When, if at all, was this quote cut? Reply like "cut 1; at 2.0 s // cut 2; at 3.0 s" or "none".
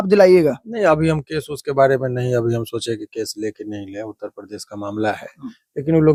none